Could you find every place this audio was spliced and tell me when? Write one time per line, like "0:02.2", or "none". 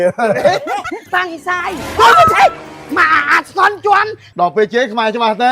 0:01.0
0:04.2